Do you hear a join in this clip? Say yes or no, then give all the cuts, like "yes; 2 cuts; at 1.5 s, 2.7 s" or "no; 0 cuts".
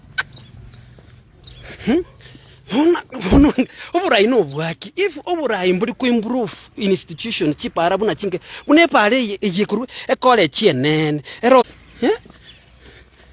yes; 1 cut; at 11.6 s